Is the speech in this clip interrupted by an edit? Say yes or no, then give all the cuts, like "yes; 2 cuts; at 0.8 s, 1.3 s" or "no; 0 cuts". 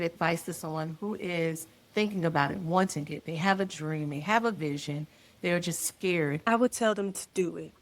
yes; 1 cut; at 6.5 s